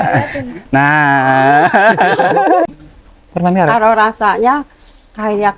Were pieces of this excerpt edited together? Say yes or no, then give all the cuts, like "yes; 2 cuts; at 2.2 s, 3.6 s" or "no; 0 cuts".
yes; 1 cut; at 2.7 s